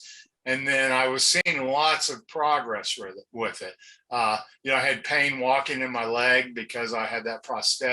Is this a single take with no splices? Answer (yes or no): no